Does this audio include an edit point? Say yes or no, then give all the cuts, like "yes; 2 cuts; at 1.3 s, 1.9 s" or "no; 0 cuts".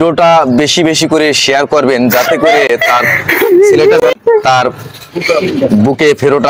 no; 0 cuts